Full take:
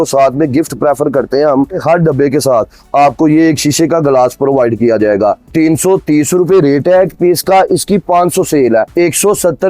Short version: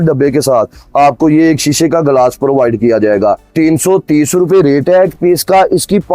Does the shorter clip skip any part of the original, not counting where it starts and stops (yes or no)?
no